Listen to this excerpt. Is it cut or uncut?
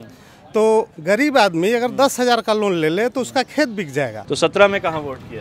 cut